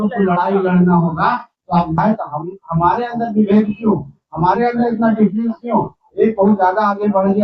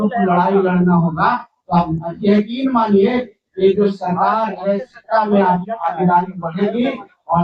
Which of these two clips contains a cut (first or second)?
first